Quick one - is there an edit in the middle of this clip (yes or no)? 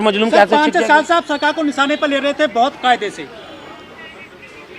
no